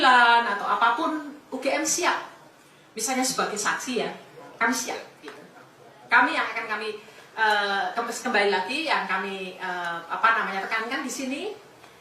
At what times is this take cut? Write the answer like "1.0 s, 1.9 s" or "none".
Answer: none